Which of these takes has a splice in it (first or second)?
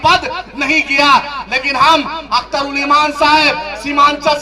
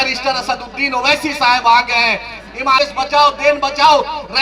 second